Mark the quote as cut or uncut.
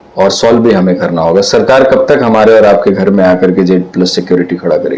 uncut